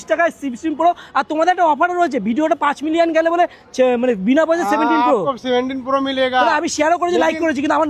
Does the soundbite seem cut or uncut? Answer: uncut